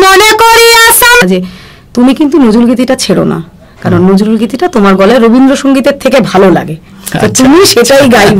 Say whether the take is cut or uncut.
cut